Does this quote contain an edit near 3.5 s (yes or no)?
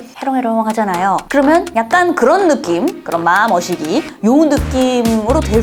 no